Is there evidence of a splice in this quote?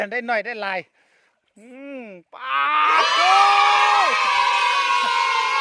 yes; 1 cut; at 3.8 s

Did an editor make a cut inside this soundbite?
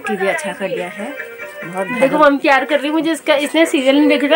no; 0 cuts

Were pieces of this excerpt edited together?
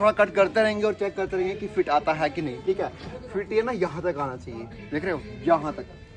no; 0 cuts

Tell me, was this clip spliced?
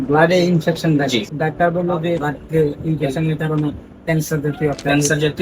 yes; 2 cuts; at 1.3 s, 2.3 s

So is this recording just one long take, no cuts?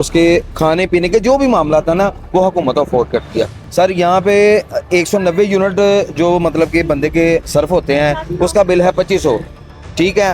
no; 1 cut; at 3.6 s

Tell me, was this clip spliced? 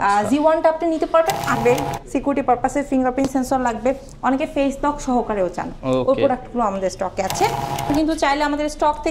yes; 2 cuts; at 1.6 s, 7.9 s

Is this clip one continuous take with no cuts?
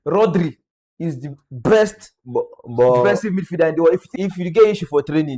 no; 1 cut; at 4.1 s

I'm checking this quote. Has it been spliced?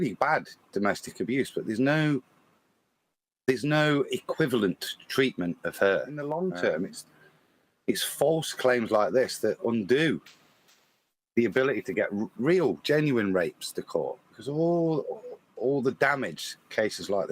yes; 1 cut; at 6.2 s

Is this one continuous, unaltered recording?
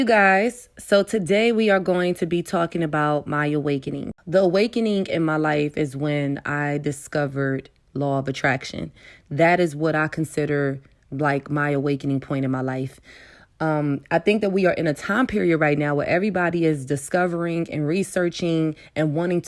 no; 1 cut; at 4.1 s

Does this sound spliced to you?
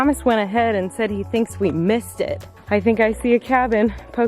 yes; 1 cut; at 2.5 s

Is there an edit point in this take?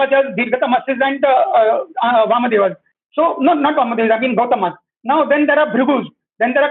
no; 0 cuts

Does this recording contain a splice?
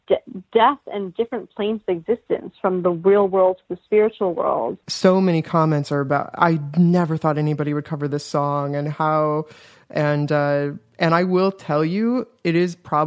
yes; 1 cut; at 4.8 s

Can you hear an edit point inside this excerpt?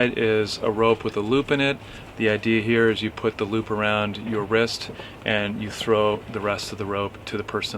no; 0 cuts

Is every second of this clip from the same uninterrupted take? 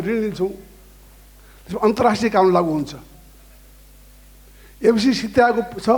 yes; 0 cuts

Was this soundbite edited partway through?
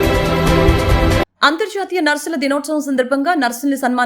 yes; 1 cut; at 1.2 s

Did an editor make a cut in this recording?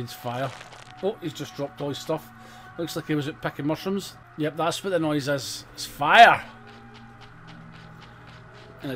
yes; 1 cut; at 4.2 s

